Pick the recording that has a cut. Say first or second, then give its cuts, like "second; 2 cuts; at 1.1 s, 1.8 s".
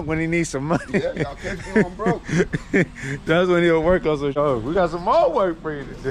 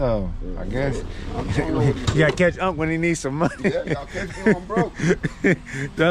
first; 1 cut; at 4.4 s